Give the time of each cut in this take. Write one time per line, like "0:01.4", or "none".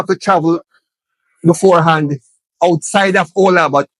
none